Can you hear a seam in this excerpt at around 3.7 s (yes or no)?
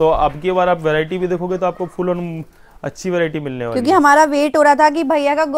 no